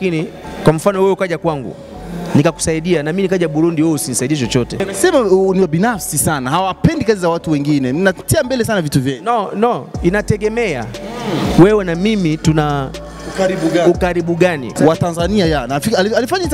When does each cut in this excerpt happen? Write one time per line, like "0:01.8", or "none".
0:04.9
0:14.7